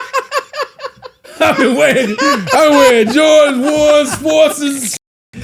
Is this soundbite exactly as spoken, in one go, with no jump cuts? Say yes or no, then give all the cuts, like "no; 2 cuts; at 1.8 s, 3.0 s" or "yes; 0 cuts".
no; 1 cut; at 1.2 s